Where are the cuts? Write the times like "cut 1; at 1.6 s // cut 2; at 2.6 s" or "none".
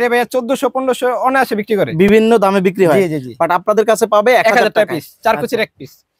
none